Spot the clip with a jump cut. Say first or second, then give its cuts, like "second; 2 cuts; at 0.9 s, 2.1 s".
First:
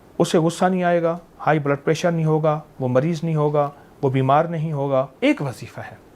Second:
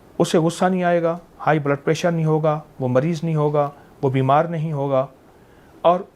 first; 1 cut; at 5.1 s